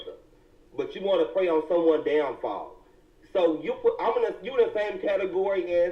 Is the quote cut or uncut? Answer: uncut